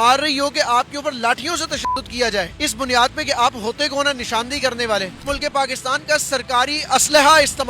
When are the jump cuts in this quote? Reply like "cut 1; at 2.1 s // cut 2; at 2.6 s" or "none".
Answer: cut 1; at 2.5 s // cut 2; at 5.2 s